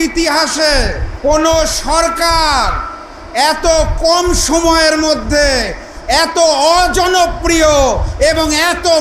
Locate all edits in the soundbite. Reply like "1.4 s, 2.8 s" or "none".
1.0 s